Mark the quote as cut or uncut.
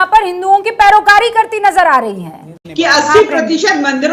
cut